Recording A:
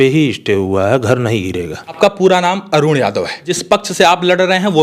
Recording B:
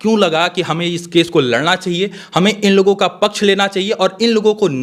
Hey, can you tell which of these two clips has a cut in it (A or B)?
A